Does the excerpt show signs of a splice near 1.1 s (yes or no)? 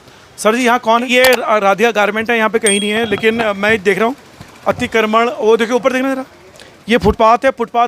yes